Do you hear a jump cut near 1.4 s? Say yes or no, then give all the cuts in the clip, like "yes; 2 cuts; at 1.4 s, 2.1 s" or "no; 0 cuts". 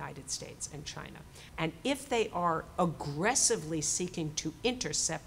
yes; 1 cut; at 1.4 s